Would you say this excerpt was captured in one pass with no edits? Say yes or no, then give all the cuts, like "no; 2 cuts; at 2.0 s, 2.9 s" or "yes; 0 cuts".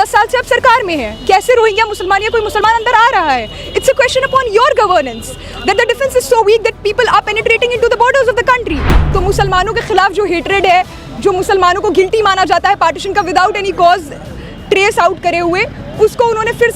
no; 1 cut; at 8.8 s